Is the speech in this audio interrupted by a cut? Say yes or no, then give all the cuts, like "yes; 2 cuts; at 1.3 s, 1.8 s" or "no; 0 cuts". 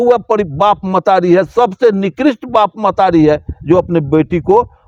no; 0 cuts